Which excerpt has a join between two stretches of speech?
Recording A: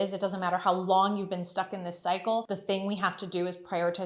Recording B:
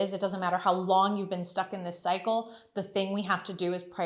A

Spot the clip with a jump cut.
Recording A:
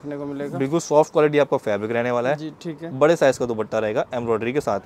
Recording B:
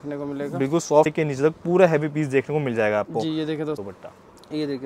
B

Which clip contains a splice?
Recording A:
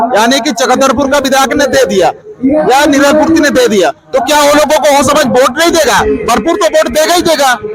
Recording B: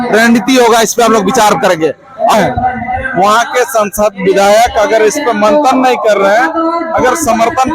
B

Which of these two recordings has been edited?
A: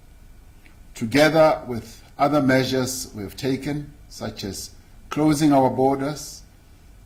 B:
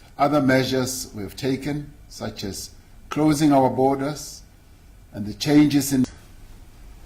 B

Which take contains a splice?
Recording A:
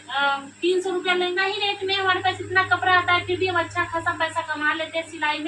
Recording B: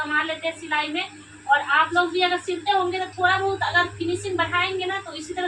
A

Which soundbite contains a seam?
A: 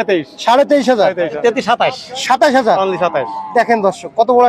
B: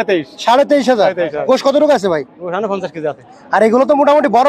A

